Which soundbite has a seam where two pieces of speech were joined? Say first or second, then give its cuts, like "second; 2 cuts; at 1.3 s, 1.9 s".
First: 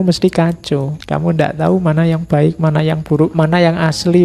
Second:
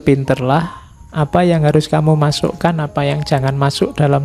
first; 2 cuts; at 1.0 s, 3.3 s